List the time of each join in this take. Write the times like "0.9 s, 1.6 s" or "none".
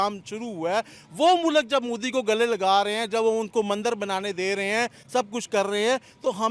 none